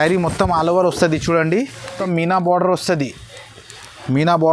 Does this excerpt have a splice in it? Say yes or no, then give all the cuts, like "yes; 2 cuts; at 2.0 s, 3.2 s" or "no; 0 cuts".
yes; 1 cut; at 1.9 s